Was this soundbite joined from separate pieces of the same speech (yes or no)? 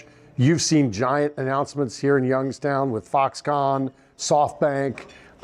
no